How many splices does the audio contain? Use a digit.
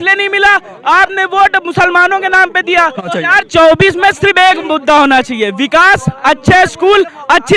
1